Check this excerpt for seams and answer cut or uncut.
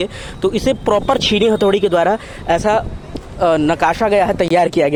uncut